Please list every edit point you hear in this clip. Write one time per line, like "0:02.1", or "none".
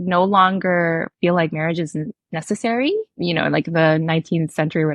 0:03.2